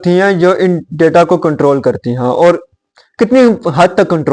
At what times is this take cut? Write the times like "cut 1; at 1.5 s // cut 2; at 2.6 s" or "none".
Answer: none